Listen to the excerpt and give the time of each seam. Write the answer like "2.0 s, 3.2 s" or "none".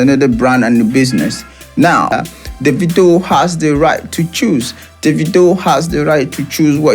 2.1 s